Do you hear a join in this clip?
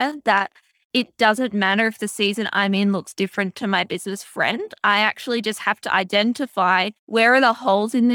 yes; 1 cut; at 7.0 s

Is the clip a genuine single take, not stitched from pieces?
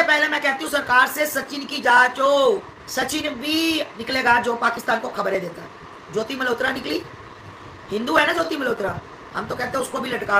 no; 2 cuts; at 2.8 s, 4.0 s

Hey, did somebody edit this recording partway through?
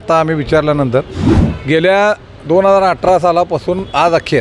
yes; 1 cut; at 1.4 s

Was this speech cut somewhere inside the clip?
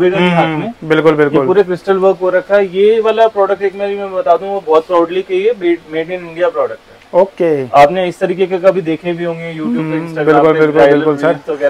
no; 0 cuts

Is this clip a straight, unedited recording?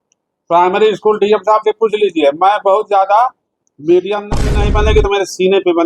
no; 1 cut; at 4.3 s

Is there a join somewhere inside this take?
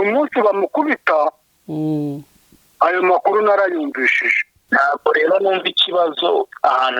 yes; 1 cut; at 4.6 s

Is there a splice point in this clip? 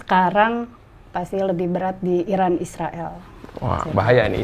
no; 0 cuts

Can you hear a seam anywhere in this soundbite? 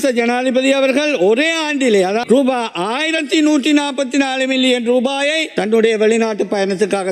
yes; 1 cut; at 2.2 s

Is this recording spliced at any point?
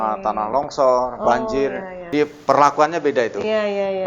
yes; 1 cut; at 2.1 s

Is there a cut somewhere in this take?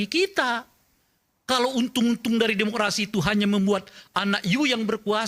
no; 0 cuts

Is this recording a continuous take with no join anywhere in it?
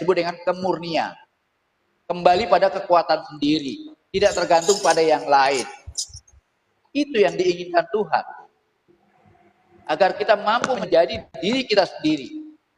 no; 1 cut; at 10.8 s

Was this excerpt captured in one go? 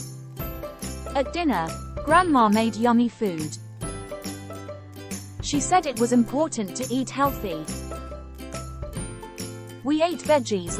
no; 4 cuts; at 3.5 s, 5.2 s, 7.6 s, 9.3 s

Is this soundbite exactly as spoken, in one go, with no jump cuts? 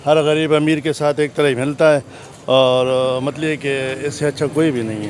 yes; 0 cuts

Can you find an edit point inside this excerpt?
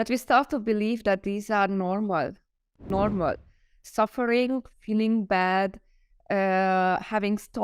yes; 1 cut; at 2.9 s

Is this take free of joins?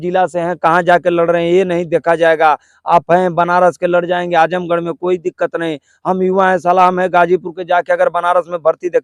yes; 0 cuts

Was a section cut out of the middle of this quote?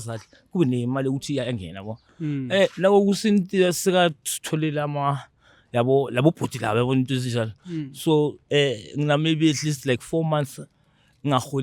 yes; 1 cut; at 8.4 s

